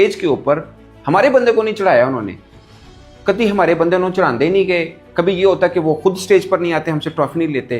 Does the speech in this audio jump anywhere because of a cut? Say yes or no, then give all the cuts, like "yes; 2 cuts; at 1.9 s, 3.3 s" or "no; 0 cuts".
no; 0 cuts